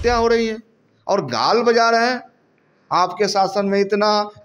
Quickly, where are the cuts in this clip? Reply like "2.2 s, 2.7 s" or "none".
none

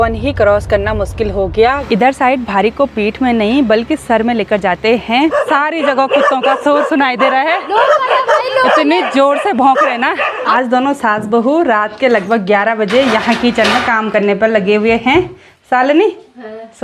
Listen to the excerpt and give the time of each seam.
1.8 s, 5.3 s, 10.5 s

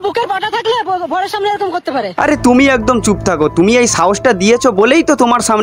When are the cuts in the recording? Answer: none

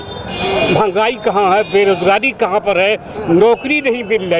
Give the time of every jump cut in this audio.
none

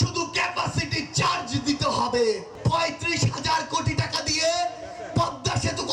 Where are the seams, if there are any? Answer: 2.5 s

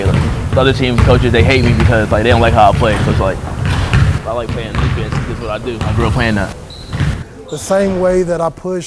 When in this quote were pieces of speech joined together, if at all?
7.2 s

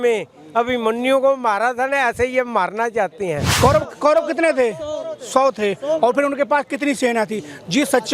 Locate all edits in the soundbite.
3.5 s

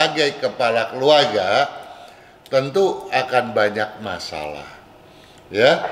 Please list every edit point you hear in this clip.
none

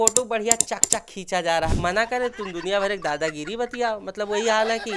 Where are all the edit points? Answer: 1.7 s

